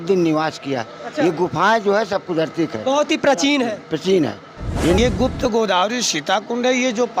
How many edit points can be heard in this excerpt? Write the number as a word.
one